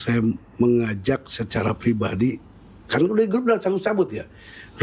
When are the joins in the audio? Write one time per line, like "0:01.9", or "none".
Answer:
none